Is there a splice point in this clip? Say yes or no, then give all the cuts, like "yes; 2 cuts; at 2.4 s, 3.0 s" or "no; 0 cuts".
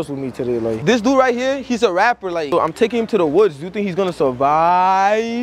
yes; 2 cuts; at 0.8 s, 2.4 s